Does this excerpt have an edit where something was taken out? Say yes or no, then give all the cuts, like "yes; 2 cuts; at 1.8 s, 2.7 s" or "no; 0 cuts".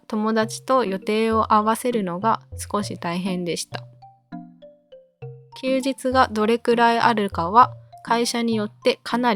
no; 0 cuts